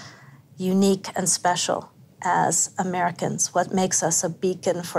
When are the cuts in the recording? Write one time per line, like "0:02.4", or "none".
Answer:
none